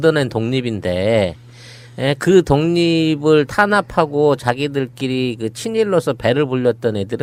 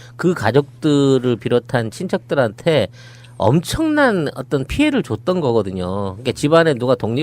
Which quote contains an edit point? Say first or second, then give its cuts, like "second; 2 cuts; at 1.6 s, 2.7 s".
second; 1 cut; at 3.2 s